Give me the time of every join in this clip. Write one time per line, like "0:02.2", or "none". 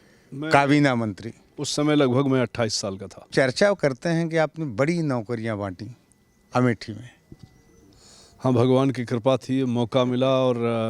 0:03.1